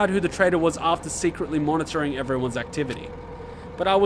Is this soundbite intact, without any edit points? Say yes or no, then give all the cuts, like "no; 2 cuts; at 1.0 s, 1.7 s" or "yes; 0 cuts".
yes; 0 cuts